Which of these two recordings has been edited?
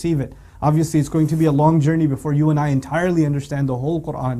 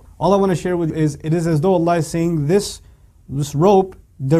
second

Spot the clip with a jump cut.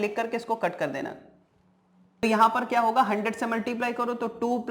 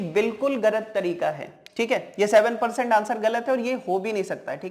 first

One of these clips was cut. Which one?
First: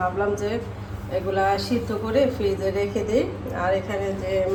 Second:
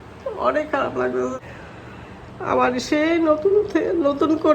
second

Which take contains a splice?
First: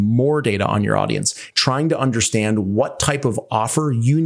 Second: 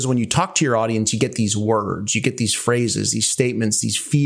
first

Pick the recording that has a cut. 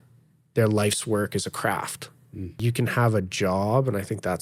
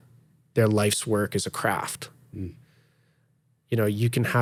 first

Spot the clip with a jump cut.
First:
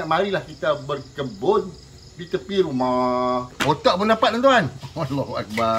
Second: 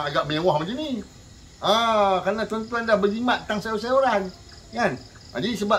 first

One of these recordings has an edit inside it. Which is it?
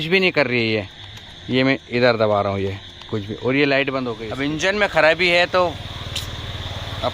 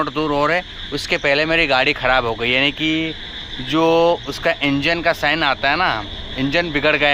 first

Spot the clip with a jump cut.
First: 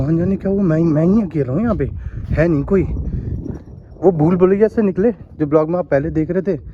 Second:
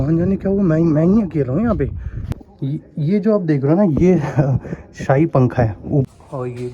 second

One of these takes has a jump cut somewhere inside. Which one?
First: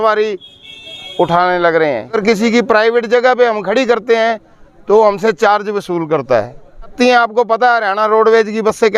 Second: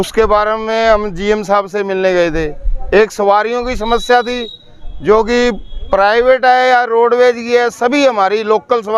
first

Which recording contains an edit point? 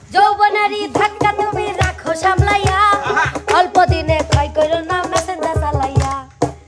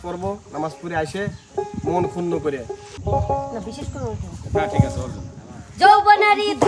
second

